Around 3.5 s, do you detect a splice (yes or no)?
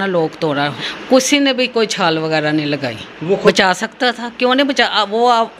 yes